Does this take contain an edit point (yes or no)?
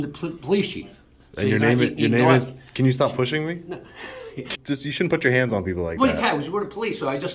yes